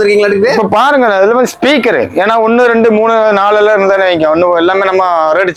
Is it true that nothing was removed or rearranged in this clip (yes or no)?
yes